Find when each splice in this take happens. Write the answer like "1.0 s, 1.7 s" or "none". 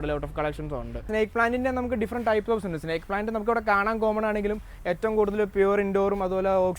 1.0 s